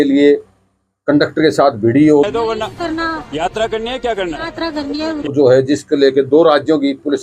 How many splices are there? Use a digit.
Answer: 2